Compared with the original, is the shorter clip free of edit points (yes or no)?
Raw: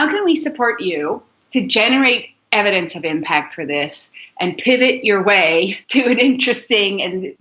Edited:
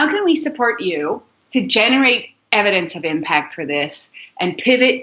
yes